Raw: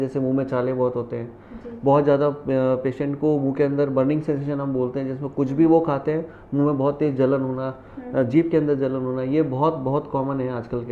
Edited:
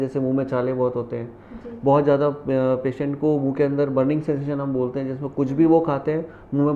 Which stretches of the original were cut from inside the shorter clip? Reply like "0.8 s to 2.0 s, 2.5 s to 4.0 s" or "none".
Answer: none

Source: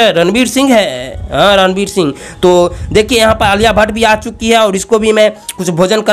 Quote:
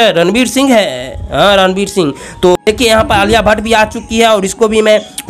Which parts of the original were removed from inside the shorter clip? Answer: 2.6 s to 2.9 s

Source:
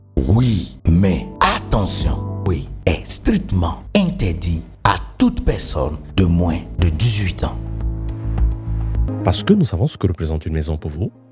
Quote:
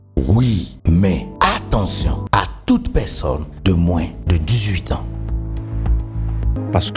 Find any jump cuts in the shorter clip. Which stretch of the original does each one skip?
2.2 s to 4.7 s

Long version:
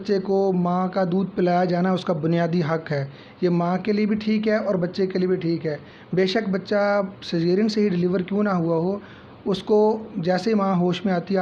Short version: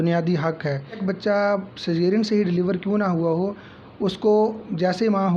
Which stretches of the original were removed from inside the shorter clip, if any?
3.3 s to 6.5 s

